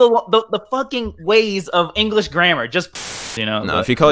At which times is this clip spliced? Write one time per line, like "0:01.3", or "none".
0:03.2